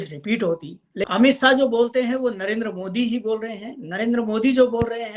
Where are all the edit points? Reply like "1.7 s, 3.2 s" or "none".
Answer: 1.1 s